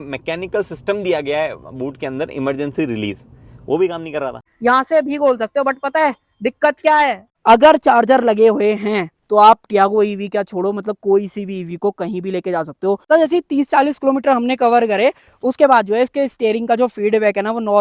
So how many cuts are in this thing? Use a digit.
3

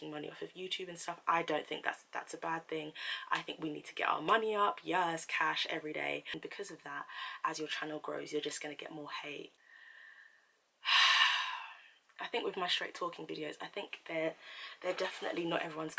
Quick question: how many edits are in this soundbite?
2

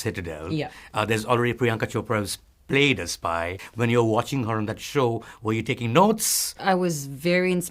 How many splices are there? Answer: 2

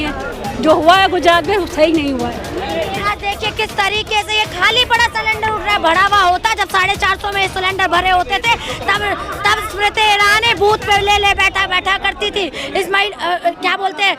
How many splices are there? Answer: 1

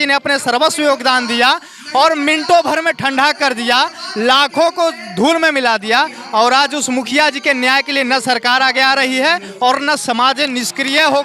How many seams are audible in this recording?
0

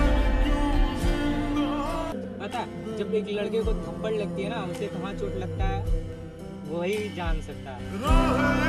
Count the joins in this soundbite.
1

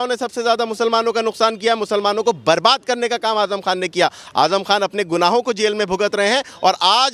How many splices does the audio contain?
0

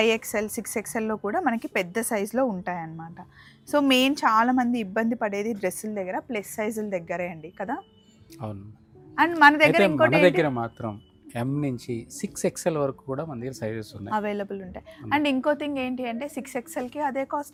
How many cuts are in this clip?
0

